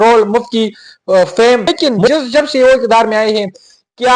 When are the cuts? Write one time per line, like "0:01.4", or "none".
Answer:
0:01.9